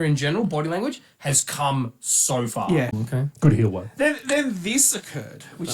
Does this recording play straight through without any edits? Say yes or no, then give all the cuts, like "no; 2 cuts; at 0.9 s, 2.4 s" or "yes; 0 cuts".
no; 1 cut; at 3.0 s